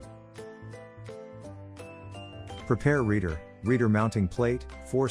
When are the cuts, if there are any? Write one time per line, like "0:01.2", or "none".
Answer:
0:02.6